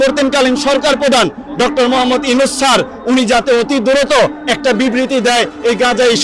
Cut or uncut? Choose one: uncut